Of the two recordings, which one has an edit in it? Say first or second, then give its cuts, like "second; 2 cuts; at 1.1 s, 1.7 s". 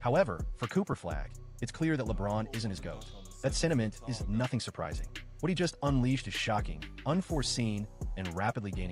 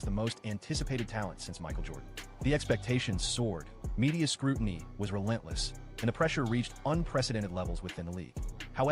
second; 1 cut; at 4.3 s